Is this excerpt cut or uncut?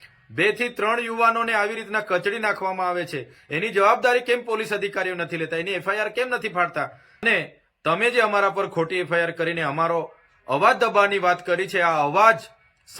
cut